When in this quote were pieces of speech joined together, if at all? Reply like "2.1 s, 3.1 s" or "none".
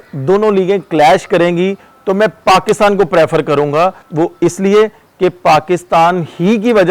4.0 s